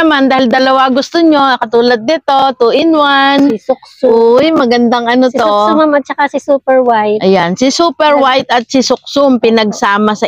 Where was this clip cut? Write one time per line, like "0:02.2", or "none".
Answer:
none